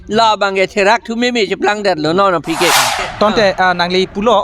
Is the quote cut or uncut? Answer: cut